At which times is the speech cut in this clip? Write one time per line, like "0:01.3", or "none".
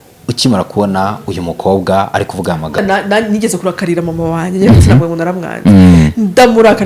0:02.8